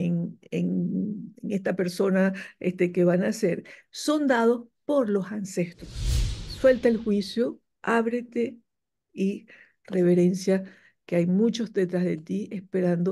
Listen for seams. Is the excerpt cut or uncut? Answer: cut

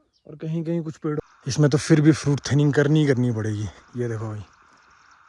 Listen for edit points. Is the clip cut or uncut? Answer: cut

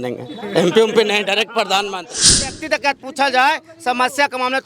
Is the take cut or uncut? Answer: cut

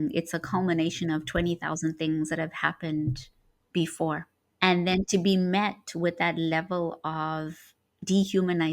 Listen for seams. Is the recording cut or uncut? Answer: cut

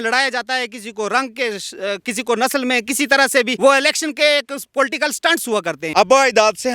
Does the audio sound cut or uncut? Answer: cut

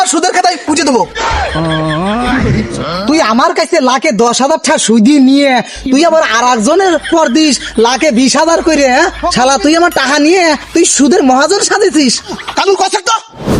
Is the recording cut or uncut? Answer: cut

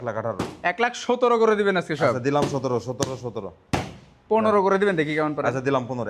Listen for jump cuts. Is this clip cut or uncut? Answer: uncut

